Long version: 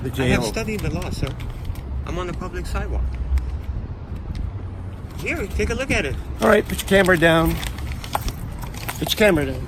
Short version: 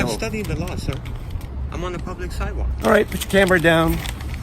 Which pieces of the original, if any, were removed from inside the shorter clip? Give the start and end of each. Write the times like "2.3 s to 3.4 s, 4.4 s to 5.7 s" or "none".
3.0 s to 6.3 s